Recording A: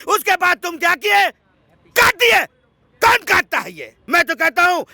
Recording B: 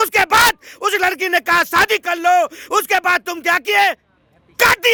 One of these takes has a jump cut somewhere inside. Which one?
A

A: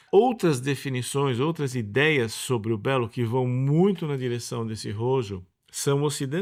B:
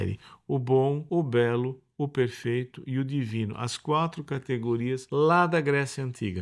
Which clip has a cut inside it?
B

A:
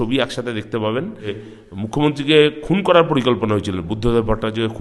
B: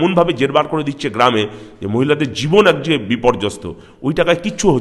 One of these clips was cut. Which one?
A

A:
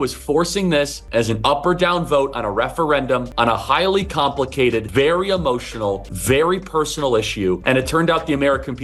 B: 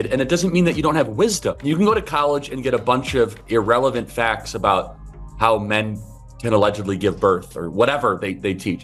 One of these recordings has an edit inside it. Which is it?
A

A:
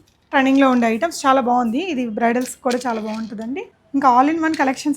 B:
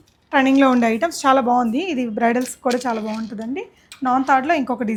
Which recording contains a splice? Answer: A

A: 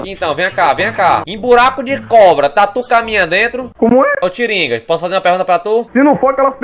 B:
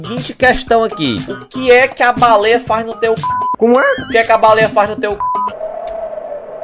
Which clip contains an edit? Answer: A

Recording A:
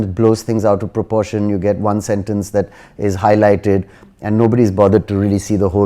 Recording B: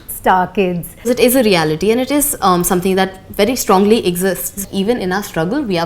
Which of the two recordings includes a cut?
B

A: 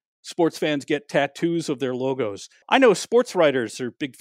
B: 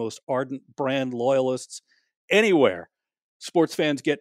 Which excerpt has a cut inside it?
A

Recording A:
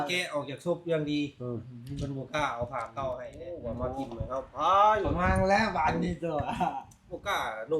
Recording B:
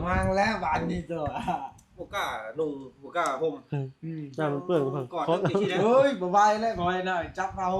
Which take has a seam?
A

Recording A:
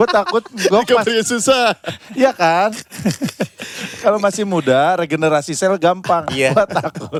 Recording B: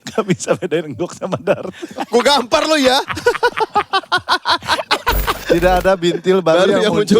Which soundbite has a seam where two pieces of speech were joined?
B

